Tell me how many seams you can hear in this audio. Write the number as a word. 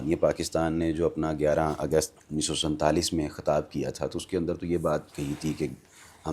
one